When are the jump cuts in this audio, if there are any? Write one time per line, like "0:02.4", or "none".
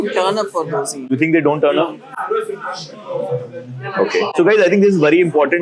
0:01.0
0:04.3